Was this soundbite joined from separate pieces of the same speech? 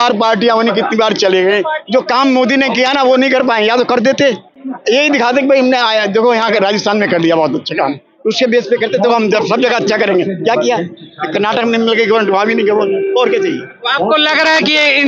no; 0 cuts

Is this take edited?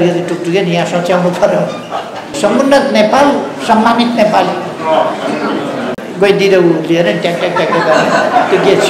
yes; 2 cuts; at 2.3 s, 5.9 s

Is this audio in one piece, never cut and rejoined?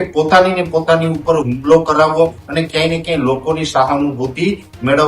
no; 1 cut; at 2.4 s

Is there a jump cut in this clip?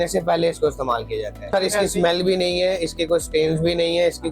yes; 1 cut; at 1.5 s

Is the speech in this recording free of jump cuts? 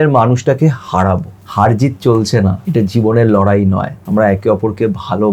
no; 3 cuts; at 1.4 s, 2.6 s, 4.0 s

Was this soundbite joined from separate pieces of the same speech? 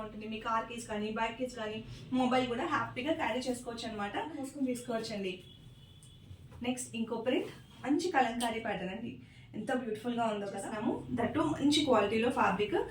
yes; 2 cuts; at 4.4 s, 10.7 s

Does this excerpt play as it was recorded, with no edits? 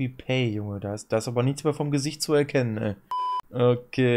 yes; 0 cuts

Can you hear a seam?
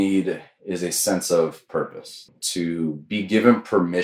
yes; 1 cut; at 2.4 s

